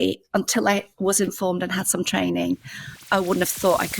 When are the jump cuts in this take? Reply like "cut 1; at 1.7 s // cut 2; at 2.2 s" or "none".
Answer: cut 1; at 3.0 s